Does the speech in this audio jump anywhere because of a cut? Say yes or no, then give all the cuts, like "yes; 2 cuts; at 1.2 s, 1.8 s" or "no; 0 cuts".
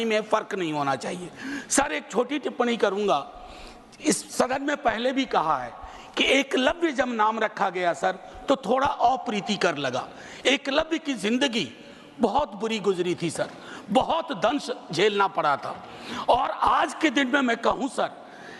no; 0 cuts